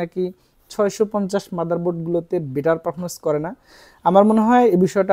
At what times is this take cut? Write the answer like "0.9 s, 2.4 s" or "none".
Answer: none